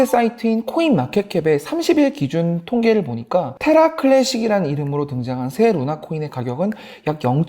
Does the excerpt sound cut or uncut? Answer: cut